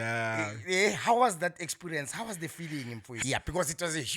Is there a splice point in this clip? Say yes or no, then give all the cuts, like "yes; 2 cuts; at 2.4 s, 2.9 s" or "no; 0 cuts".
yes; 1 cut; at 3.1 s